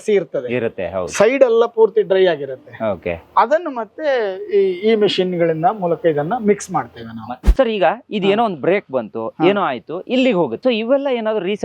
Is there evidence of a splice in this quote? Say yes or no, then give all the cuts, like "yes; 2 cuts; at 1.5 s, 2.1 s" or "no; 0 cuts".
yes; 2 cuts; at 7.2 s, 10.6 s